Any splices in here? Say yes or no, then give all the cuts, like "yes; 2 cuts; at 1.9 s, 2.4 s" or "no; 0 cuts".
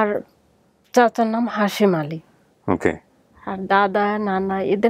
no; 0 cuts